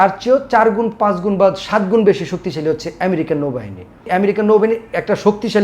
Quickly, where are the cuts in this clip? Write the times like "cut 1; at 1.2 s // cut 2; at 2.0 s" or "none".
cut 1; at 4.1 s